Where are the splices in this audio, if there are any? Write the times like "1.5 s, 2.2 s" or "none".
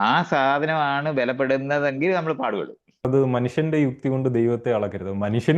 3.1 s